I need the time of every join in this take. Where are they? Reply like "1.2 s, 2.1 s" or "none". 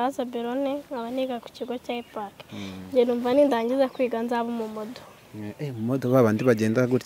none